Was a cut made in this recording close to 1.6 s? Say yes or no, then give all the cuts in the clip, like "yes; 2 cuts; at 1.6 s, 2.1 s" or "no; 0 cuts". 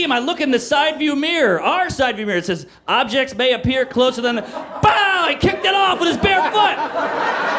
no; 0 cuts